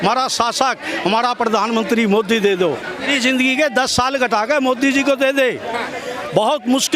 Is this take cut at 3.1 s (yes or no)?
yes